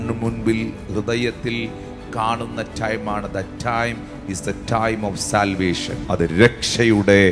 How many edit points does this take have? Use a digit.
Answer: 1